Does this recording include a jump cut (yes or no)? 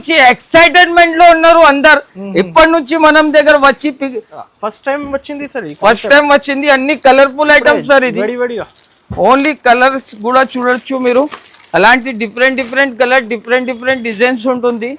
yes